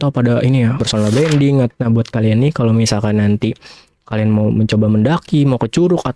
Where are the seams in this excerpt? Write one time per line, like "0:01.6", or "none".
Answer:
0:00.8
0:01.7